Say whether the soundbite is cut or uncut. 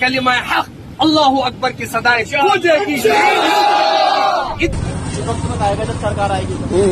cut